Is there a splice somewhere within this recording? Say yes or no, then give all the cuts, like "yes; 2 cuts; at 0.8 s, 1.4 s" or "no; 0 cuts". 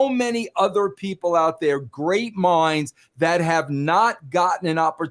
no; 0 cuts